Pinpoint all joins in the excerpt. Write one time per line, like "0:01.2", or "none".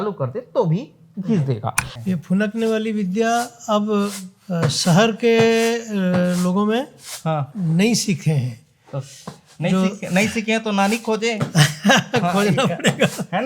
0:01.9